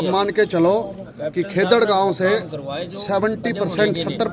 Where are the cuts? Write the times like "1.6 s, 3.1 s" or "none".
none